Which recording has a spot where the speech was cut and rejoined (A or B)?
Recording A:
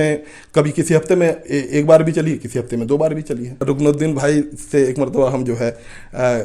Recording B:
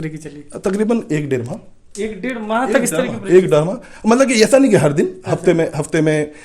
A